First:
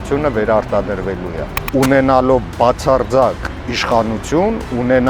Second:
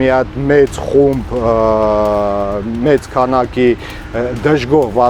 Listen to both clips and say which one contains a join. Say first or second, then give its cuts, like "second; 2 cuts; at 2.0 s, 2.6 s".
first; 1 cut; at 1.6 s